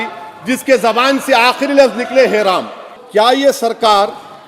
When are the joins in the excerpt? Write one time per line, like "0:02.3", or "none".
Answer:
0:03.0